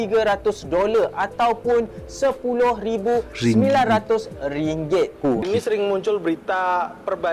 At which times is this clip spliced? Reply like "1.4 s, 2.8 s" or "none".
5.4 s